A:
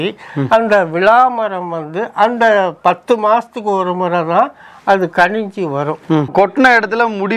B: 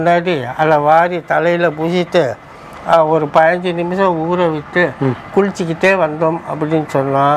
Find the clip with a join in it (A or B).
A